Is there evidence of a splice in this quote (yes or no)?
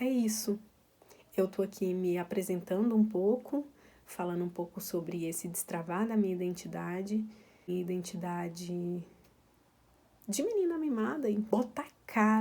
yes